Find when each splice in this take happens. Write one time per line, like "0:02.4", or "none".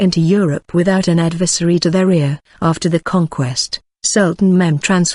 none